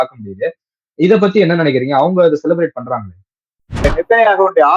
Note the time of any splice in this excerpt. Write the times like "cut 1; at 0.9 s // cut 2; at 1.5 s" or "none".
cut 1; at 3.8 s